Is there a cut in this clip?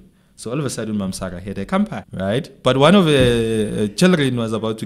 yes; 1 cut; at 2.0 s

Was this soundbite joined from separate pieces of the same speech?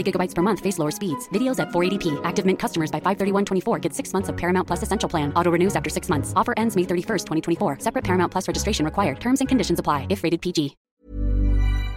yes; 1 cut; at 10.9 s

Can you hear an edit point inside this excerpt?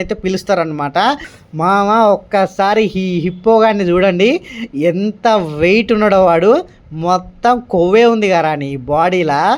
yes; 1 cut; at 1.3 s

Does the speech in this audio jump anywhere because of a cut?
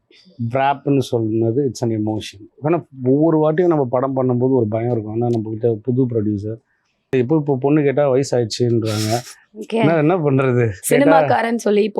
yes; 1 cut; at 7.1 s

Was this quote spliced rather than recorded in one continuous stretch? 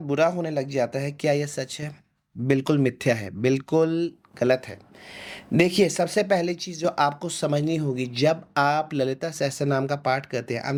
no; 0 cuts

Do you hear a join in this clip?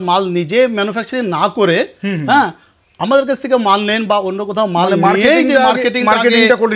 no; 0 cuts

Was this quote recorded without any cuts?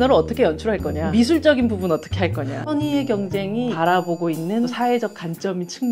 no; 4 cuts; at 1.0 s, 2.6 s, 3.7 s, 4.7 s

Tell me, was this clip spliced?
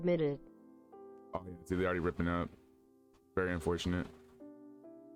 no; 0 cuts

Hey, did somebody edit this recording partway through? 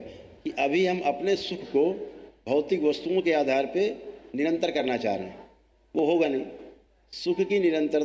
no; 0 cuts

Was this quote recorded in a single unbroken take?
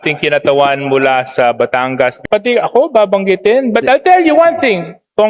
no; 1 cut; at 2.2 s

